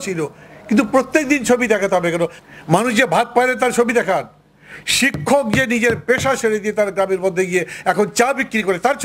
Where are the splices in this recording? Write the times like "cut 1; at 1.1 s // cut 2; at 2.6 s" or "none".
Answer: cut 1; at 2.4 s